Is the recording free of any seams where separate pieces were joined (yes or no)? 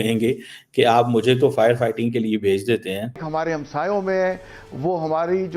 no